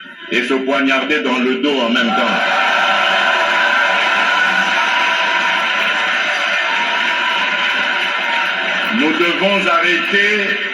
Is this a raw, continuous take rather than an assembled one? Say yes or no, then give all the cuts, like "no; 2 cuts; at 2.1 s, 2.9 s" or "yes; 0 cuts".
yes; 0 cuts